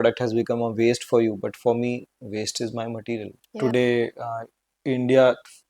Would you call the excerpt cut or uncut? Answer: cut